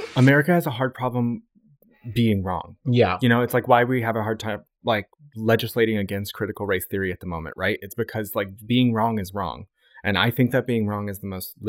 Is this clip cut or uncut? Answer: uncut